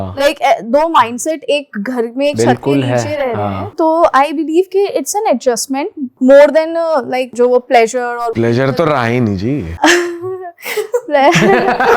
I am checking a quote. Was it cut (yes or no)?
yes